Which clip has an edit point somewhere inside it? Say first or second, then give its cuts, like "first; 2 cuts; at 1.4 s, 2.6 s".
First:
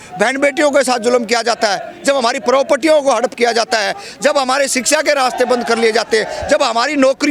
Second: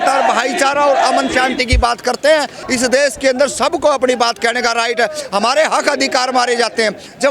second; 1 cut; at 2.6 s